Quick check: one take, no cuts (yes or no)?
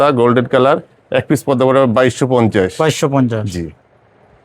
yes